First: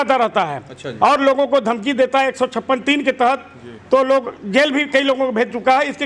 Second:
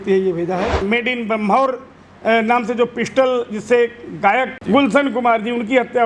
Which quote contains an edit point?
second; 2 cuts; at 0.9 s, 4.6 s

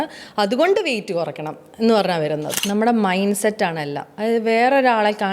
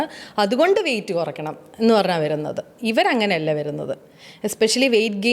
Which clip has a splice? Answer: first; 1 cut; at 2.5 s

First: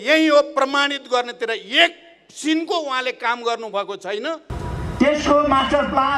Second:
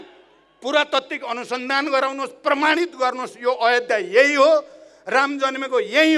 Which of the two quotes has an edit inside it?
first; 1 cut; at 4.5 s

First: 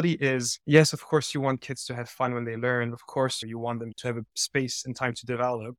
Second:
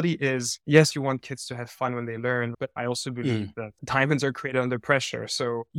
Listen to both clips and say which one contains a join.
second; 2 cuts; at 0.9 s, 2.6 s

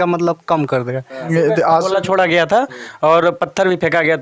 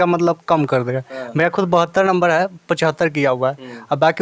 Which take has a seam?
first; 1 cut; at 1.3 s

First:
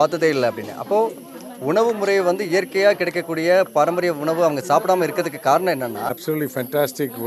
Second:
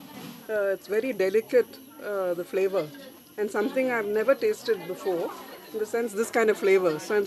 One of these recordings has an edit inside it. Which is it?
first; 1 cut; at 6.1 s

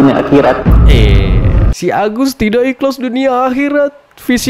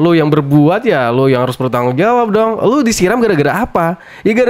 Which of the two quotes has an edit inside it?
first; 1 cut; at 1.7 s

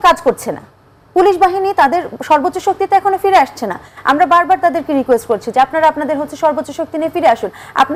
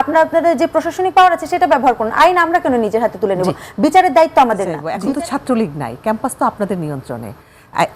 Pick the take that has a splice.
second; 1 cut; at 4.8 s

